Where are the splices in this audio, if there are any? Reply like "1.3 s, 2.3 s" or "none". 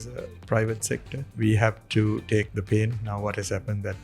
1.2 s, 2.6 s